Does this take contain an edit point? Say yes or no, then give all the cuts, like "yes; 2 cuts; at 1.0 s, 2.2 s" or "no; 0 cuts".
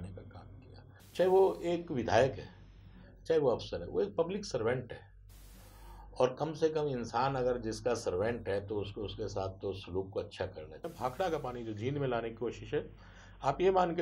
yes; 2 cuts; at 1.0 s, 10.9 s